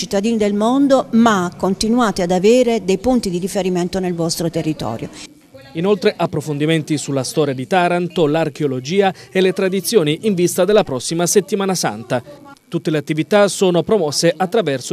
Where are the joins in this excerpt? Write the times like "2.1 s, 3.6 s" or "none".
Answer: 6.9 s